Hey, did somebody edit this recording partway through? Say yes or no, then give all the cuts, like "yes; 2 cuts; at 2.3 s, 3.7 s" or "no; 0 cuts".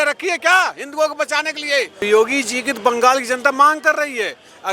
yes; 1 cut; at 2.1 s